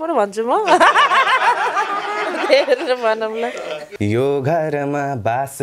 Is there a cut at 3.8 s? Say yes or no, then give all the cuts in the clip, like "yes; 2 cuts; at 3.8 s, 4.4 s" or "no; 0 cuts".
yes; 1 cut; at 3.8 s